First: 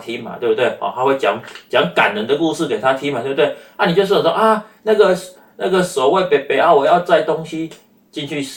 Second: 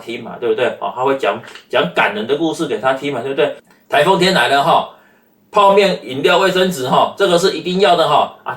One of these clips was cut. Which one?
second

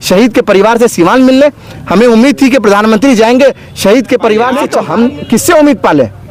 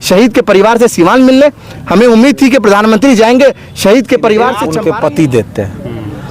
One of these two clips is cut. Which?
second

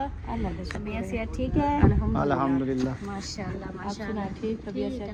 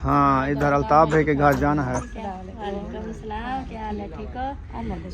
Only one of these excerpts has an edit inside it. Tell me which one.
second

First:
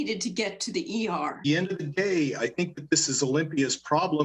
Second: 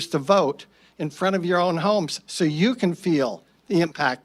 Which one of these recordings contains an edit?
first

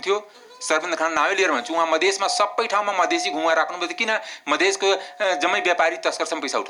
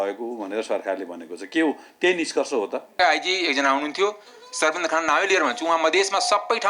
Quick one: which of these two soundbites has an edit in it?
second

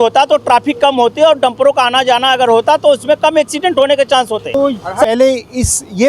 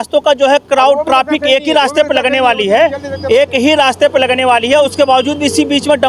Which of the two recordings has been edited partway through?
first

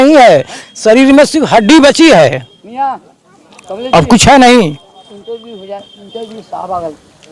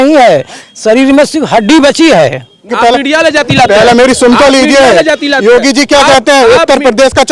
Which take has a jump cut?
second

